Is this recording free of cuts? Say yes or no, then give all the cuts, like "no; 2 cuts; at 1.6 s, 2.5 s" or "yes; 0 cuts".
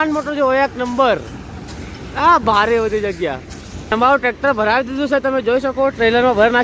no; 1 cut; at 3.9 s